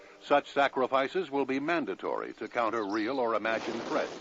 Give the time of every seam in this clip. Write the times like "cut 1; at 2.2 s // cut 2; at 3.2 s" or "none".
cut 1; at 1.9 s